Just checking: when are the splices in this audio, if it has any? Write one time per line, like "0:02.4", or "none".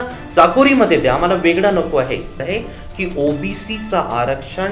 0:02.4